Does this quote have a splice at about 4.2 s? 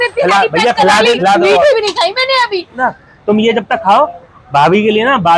no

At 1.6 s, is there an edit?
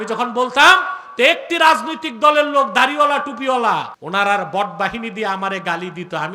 no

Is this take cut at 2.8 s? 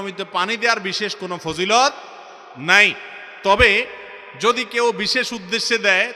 no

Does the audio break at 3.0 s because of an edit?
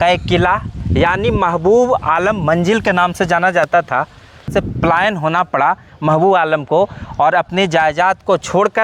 no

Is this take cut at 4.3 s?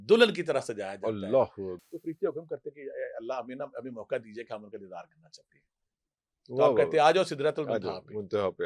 no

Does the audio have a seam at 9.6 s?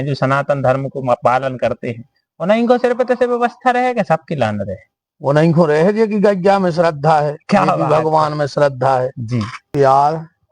yes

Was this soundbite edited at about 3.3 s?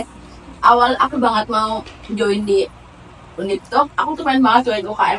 no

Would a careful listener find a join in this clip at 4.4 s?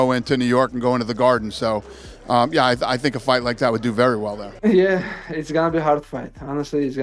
yes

